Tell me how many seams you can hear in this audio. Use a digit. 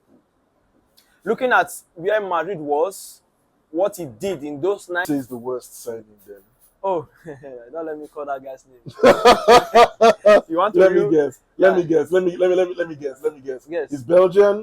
1